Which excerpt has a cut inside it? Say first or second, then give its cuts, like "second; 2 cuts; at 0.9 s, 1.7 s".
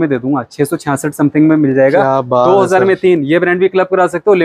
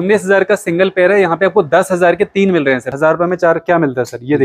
second; 1 cut; at 2.9 s